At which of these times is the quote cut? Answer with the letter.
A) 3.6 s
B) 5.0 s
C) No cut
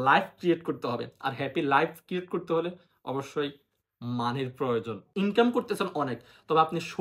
B